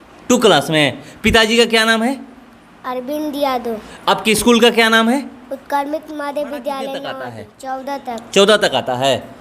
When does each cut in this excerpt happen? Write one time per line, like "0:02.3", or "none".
0:07.3